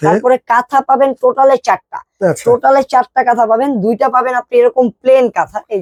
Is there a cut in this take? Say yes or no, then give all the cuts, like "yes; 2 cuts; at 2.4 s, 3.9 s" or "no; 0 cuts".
no; 0 cuts